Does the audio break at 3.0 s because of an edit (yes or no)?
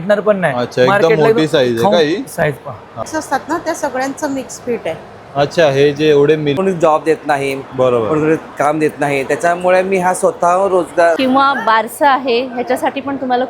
yes